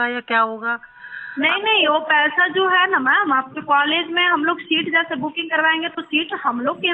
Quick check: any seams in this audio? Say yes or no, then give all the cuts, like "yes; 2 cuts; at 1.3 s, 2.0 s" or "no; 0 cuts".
no; 0 cuts